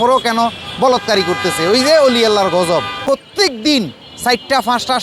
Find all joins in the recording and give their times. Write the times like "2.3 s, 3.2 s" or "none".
3.0 s